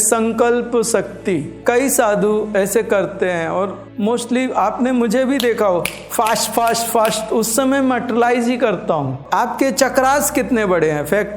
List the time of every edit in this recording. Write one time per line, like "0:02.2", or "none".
0:03.8
0:09.2